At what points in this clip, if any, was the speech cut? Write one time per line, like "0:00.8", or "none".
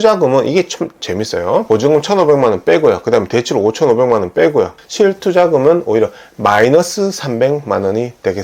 0:01.6
0:04.8